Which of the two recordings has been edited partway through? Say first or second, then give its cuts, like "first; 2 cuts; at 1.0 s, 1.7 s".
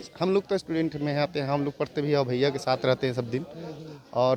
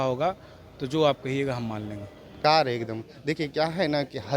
second; 1 cut; at 2.4 s